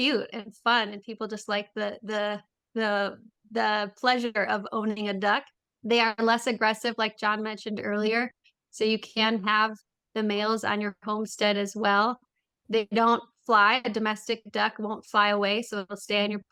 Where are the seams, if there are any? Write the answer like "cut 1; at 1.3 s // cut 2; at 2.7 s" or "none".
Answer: none